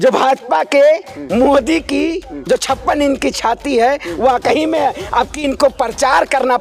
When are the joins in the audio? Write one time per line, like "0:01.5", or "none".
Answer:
none